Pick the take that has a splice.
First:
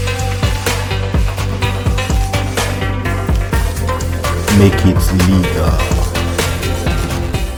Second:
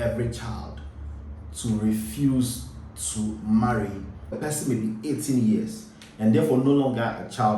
second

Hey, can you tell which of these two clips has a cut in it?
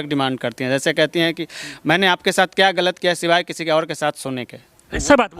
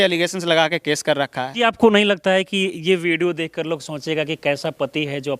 second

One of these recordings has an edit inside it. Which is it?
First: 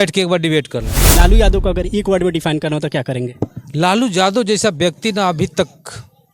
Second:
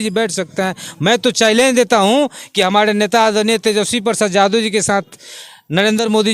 first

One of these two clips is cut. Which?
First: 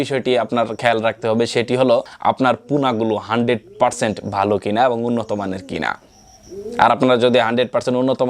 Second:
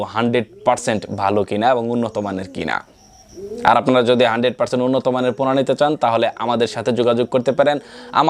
first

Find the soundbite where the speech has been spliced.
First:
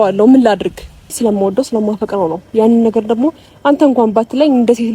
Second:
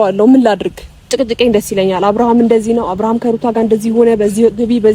first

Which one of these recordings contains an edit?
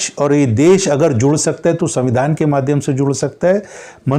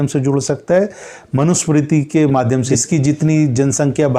second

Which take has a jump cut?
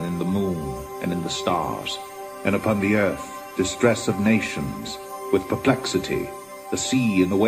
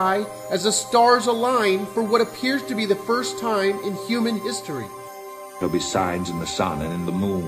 second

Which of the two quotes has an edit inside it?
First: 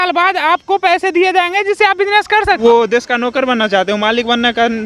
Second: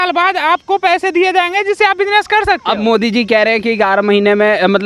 first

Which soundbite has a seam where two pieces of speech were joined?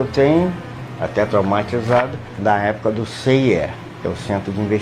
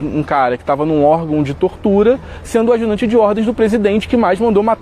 first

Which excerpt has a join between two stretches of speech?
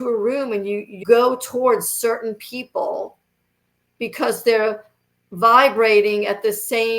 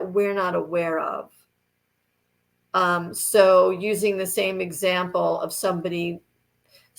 first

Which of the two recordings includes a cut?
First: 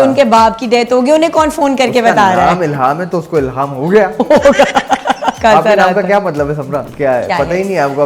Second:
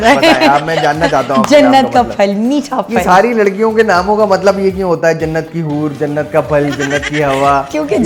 first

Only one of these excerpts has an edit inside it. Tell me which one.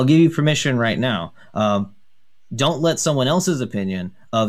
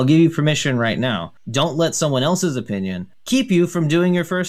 second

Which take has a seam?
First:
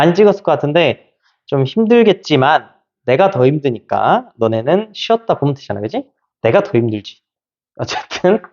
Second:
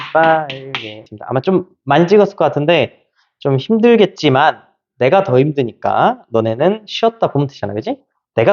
second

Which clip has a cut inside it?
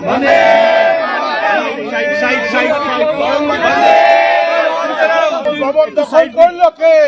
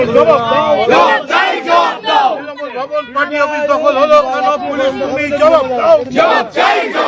first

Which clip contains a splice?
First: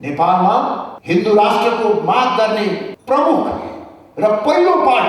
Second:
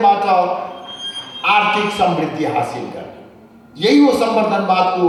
first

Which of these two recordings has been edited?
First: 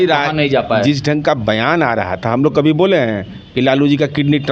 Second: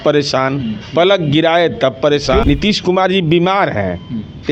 second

